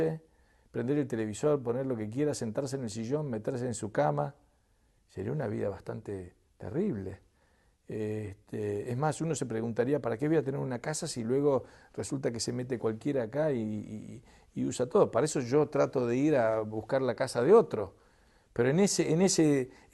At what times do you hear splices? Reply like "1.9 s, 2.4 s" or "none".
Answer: none